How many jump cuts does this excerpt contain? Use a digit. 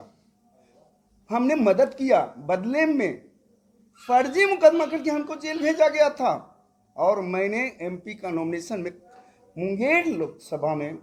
0